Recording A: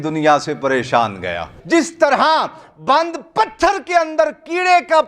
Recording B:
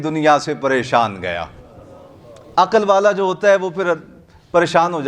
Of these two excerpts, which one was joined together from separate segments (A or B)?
A